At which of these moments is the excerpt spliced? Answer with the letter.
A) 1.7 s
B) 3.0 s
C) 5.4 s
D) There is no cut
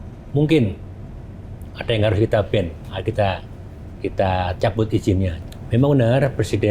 C